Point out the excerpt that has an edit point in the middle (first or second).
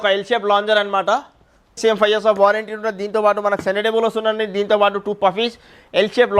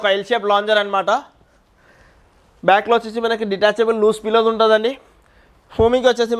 first